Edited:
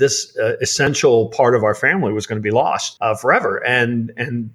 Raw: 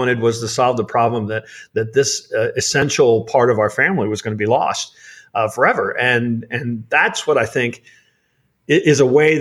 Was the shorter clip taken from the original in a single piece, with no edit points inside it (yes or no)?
no